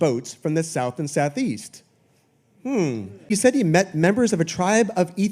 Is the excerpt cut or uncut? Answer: cut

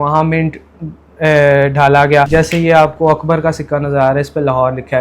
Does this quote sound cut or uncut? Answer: cut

